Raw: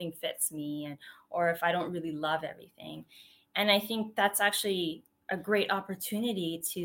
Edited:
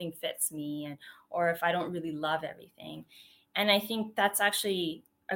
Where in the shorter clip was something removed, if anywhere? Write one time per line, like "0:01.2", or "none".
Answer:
none